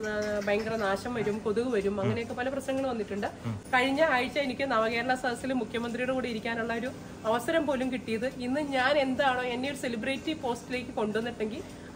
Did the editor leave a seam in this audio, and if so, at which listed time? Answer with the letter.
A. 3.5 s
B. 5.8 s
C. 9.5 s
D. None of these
A